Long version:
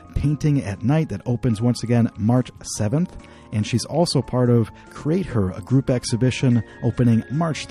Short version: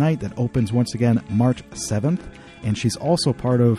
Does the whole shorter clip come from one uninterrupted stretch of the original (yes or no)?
yes